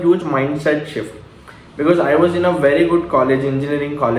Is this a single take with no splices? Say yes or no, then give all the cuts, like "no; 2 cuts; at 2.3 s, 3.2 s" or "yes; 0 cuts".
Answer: yes; 0 cuts